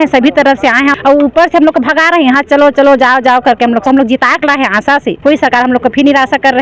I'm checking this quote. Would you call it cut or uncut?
cut